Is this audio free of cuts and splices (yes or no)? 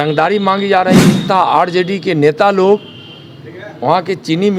no